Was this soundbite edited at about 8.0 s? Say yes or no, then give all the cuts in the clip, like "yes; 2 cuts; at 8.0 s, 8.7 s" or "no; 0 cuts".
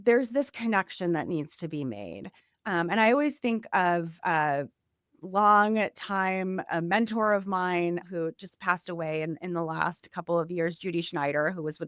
yes; 1 cut; at 8.0 s